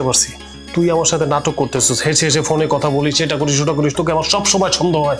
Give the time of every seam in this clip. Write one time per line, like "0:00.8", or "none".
none